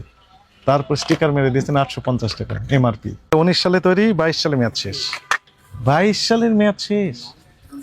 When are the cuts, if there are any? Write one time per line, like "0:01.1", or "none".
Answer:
0:03.3